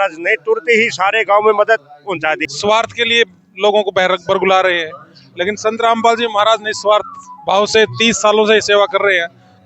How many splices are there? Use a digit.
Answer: 1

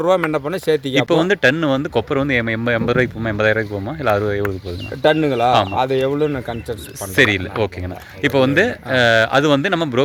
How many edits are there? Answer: 0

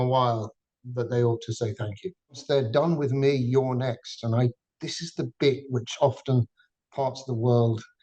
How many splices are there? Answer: 1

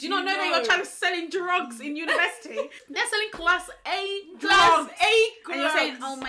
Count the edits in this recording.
1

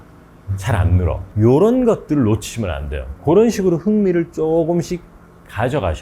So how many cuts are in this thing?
1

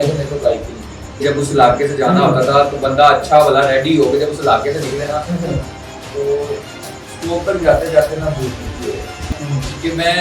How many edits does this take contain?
2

